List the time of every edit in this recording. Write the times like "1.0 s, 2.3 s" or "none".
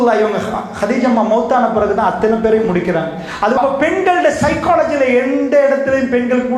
3.6 s

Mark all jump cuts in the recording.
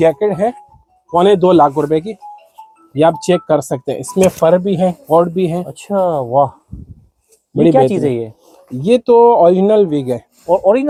none

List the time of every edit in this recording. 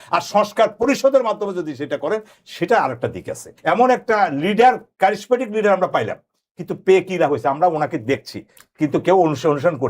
3.5 s

